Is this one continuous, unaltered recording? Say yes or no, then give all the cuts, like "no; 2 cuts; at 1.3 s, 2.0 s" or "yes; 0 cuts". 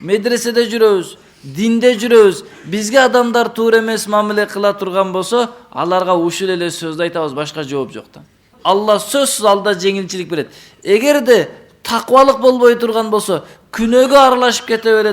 no; 1 cut; at 8.5 s